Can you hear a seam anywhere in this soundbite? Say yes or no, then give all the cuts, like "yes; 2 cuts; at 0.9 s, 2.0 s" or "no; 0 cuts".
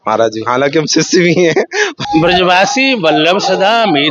yes; 1 cut; at 2.0 s